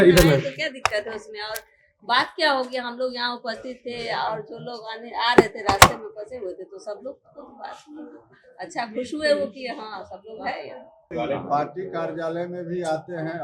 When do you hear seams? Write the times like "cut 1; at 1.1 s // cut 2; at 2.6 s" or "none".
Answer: cut 1; at 11.0 s